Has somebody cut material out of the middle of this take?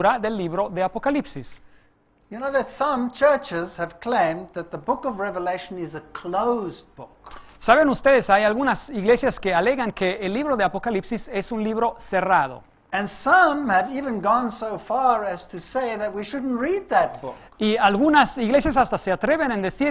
yes; 1 cut; at 15.1 s

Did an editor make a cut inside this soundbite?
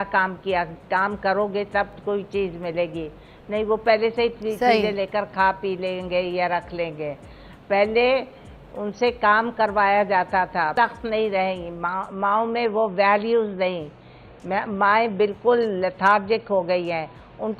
yes; 1 cut; at 10.7 s

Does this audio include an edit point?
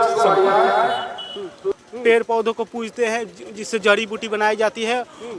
yes; 1 cut; at 1.8 s

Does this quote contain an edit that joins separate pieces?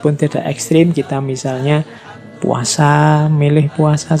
no; 0 cuts

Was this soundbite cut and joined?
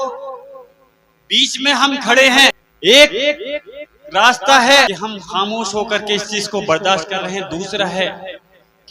yes; 2 cuts; at 2.6 s, 4.9 s

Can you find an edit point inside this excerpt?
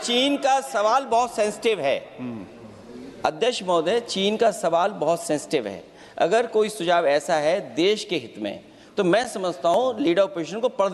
no; 0 cuts

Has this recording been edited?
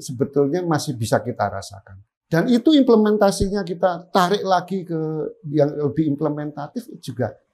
yes; 1 cut; at 2.1 s

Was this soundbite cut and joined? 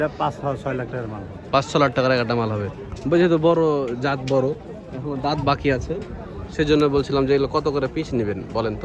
no; 0 cuts

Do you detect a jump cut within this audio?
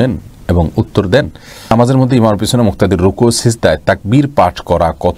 yes; 1 cut; at 1.7 s

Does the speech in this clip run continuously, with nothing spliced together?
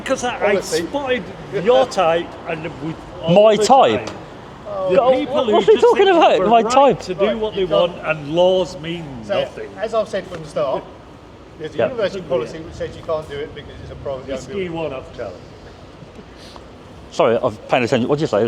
yes; 0 cuts

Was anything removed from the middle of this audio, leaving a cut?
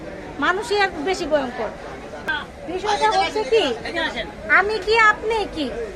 yes; 1 cut; at 2.3 s

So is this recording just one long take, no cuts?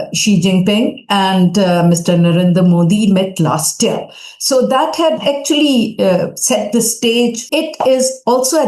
no; 1 cut; at 7.4 s

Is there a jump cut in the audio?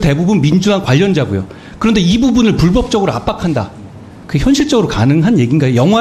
no; 0 cuts

